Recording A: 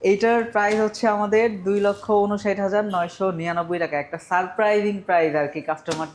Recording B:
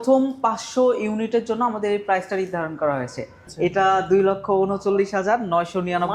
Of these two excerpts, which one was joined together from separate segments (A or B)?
B